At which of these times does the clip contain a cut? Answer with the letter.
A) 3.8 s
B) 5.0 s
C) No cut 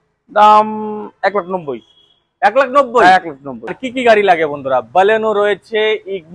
A